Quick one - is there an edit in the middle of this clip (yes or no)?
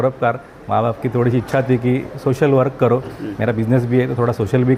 no